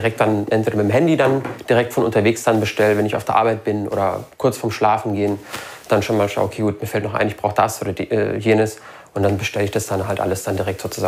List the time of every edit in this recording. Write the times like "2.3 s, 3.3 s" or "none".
none